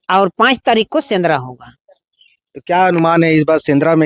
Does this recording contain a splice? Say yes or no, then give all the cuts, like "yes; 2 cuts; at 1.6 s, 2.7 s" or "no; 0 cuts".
no; 0 cuts